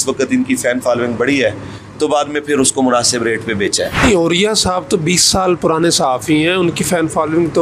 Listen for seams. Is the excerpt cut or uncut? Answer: cut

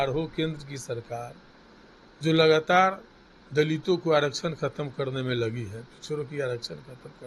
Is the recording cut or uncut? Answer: uncut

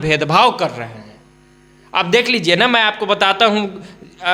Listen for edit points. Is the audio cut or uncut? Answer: uncut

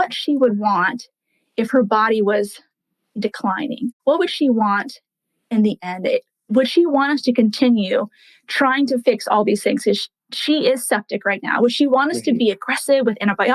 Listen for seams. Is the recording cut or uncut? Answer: cut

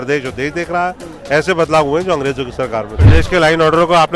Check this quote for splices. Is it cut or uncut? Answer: cut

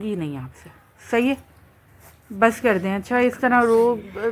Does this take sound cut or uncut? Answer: uncut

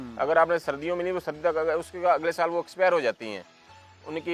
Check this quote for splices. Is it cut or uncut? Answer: uncut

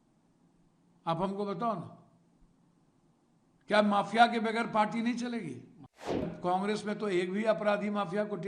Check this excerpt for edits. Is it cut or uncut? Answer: cut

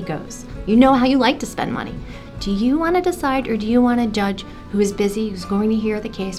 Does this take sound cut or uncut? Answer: uncut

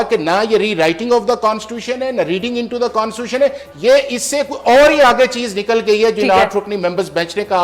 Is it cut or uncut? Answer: uncut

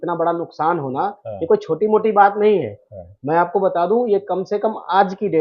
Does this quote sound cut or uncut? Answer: uncut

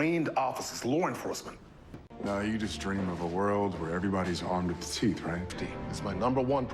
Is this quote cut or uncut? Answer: cut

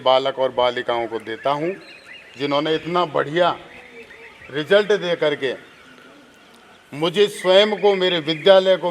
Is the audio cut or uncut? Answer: uncut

